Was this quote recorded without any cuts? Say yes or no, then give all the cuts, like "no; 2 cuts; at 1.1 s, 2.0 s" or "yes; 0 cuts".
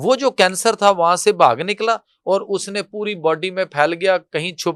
yes; 0 cuts